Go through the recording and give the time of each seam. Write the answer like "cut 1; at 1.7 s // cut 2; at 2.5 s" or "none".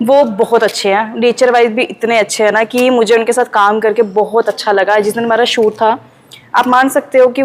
none